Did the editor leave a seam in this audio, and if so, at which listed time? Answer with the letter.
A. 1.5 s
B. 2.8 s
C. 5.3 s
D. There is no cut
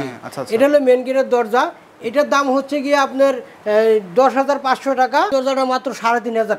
C